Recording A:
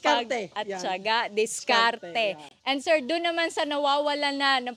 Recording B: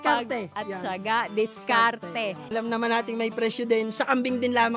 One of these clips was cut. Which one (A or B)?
B